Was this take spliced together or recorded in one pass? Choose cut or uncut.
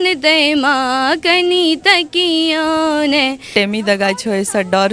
cut